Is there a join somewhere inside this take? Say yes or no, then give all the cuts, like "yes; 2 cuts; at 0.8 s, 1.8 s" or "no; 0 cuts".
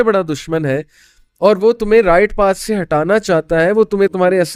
no; 0 cuts